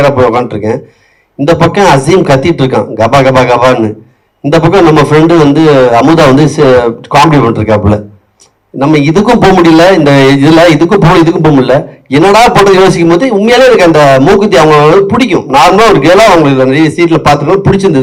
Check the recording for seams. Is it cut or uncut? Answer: uncut